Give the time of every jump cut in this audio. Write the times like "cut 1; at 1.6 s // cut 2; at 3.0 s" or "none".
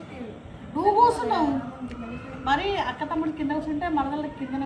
none